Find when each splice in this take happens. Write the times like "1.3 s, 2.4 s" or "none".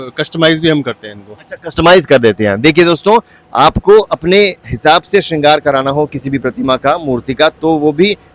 none